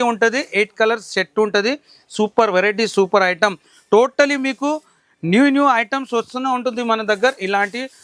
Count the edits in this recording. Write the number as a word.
zero